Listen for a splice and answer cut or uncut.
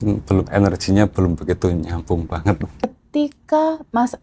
cut